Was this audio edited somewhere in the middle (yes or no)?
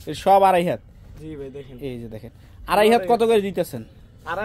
no